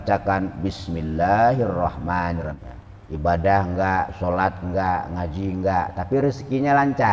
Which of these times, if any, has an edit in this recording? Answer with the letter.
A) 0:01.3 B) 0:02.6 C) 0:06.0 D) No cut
B